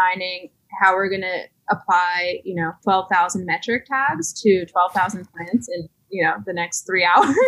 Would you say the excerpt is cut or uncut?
cut